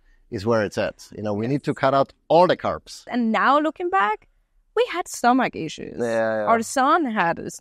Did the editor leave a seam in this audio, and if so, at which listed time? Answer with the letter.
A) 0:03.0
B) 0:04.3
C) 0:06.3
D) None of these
A